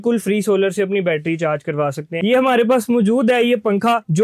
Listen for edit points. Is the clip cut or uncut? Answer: cut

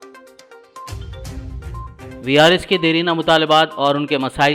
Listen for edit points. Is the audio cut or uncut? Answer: uncut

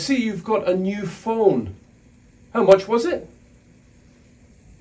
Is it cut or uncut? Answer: uncut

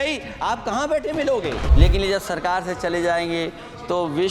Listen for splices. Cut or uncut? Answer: cut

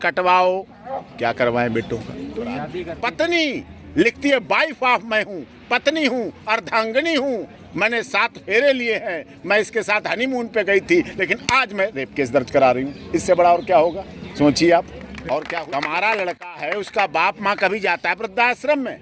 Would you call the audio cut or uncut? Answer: cut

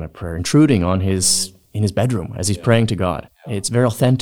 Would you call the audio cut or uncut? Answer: cut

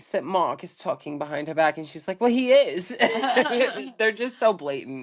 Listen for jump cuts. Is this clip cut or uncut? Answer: uncut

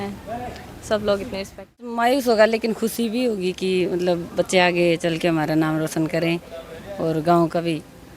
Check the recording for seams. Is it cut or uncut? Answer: cut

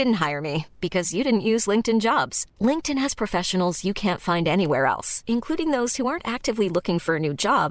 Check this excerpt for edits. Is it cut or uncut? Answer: uncut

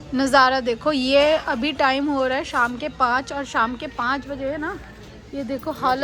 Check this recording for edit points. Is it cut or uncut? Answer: uncut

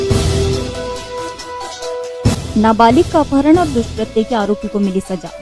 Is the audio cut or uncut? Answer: cut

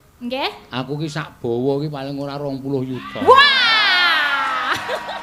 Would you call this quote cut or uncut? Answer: uncut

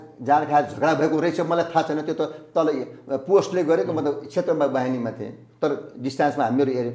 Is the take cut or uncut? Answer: uncut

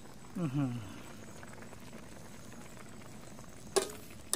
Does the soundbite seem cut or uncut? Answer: uncut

